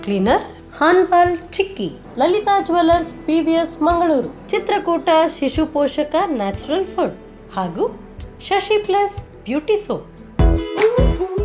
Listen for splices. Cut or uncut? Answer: cut